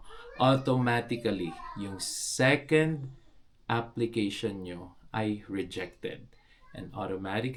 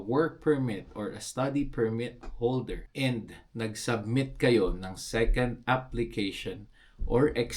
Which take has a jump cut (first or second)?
second